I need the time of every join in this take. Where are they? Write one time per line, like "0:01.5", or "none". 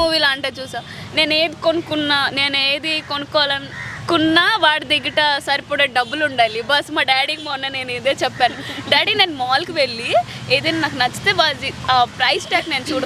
none